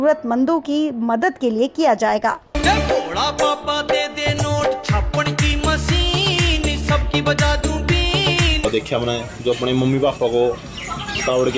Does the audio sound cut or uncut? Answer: cut